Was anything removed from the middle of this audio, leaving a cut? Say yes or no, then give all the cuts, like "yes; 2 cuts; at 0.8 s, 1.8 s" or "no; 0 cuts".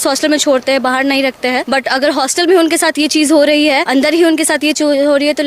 yes; 2 cuts; at 1.6 s, 3.8 s